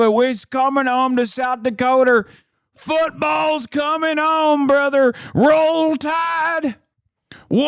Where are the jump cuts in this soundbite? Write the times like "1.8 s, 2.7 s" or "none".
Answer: none